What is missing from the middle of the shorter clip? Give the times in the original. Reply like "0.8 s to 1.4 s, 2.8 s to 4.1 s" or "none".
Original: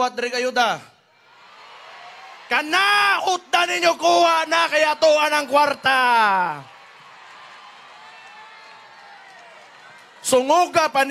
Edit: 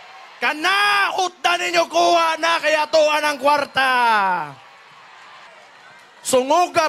7.6 s to 9.5 s

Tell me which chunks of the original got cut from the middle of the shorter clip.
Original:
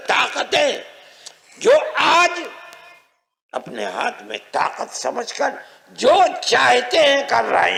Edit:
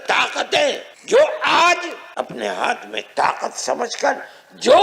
0.9 s to 1.4 s, 2.5 s to 3.4 s

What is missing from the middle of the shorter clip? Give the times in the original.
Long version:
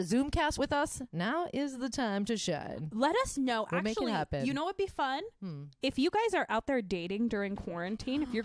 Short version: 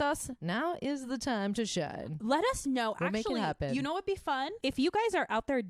5.3 s to 5.7 s

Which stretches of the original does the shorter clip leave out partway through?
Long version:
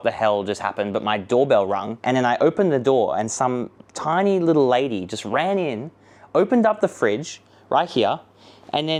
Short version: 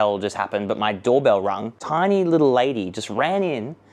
1.9 s to 3.8 s

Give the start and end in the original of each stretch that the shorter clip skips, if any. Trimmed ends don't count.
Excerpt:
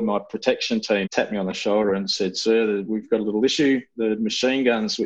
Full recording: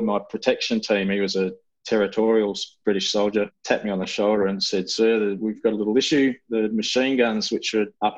1.1 s to 3.6 s

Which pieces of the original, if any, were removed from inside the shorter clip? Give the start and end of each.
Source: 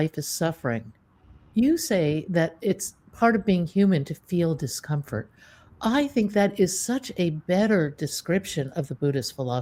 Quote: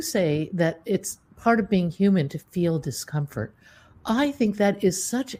none

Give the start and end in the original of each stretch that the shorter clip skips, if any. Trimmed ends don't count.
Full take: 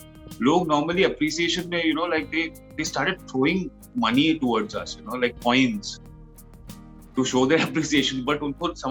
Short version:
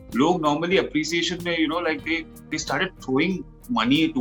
none

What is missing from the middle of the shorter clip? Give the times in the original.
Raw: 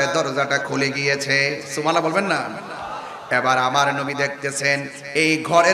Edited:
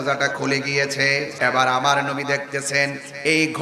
1.6 s to 3.2 s

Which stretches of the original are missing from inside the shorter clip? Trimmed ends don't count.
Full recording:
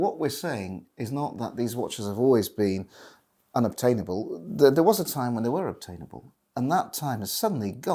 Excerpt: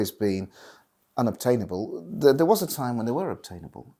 none

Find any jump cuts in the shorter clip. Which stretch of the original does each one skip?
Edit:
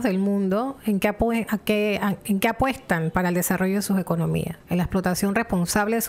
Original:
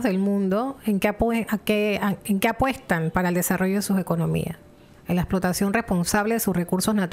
4.6 s to 4.9 s

